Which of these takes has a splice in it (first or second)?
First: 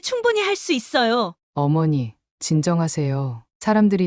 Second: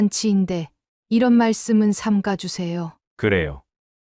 first